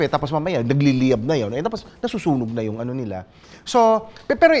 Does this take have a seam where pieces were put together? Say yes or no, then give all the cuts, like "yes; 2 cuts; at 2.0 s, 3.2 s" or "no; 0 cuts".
no; 0 cuts